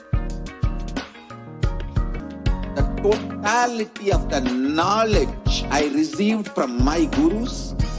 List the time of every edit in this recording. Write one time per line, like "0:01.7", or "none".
0:02.2